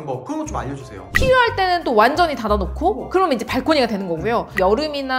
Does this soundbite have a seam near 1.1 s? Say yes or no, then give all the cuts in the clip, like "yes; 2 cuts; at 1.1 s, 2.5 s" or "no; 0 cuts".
yes; 1 cut; at 1.1 s